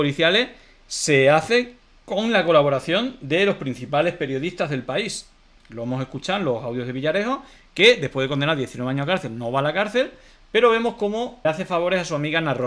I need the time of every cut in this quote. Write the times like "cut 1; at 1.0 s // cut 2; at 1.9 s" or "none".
none